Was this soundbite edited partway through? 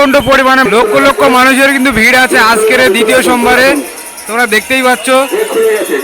no; 0 cuts

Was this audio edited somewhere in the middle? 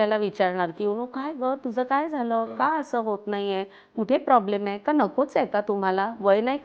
no; 0 cuts

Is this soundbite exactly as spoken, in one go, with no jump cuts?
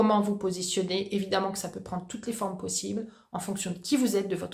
yes; 0 cuts

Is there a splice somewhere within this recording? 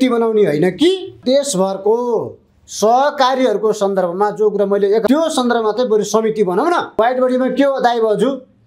yes; 3 cuts; at 1.2 s, 5.1 s, 7.0 s

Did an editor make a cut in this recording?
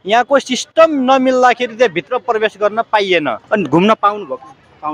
yes; 1 cut; at 3.4 s

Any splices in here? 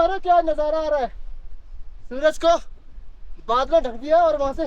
no; 0 cuts

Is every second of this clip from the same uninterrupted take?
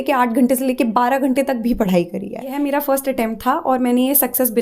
no; 1 cut; at 2.5 s

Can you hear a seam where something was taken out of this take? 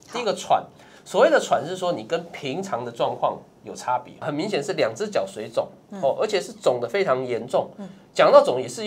yes; 1 cut; at 4.3 s

